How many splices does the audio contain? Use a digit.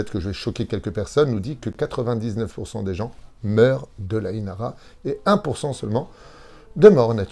0